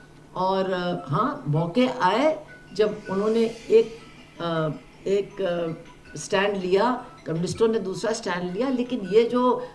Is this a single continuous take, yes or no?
yes